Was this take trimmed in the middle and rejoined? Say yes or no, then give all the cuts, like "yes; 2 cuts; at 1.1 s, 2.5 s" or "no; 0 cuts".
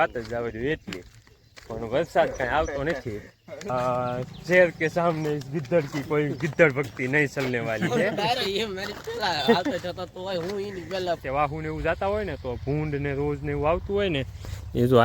yes; 2 cuts; at 3.7 s, 11.2 s